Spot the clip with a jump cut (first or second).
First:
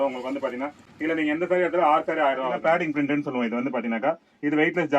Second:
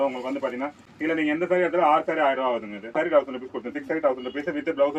first